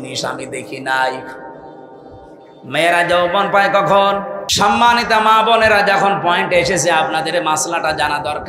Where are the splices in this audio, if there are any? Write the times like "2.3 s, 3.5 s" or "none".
4.4 s